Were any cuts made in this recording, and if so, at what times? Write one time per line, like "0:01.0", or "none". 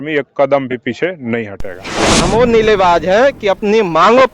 0:02.1